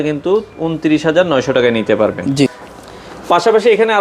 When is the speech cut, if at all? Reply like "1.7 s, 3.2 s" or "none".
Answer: none